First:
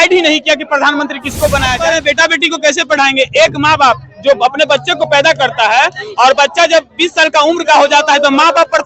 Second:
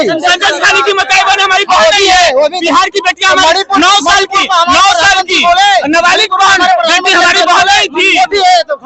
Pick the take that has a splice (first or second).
first